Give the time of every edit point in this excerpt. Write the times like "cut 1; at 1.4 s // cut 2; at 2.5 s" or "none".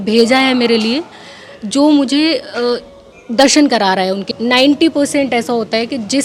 cut 1; at 4.2 s